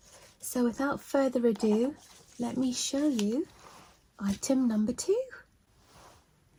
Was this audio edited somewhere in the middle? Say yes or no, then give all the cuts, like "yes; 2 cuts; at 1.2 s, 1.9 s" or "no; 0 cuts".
no; 0 cuts